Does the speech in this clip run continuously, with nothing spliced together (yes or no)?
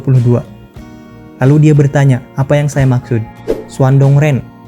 no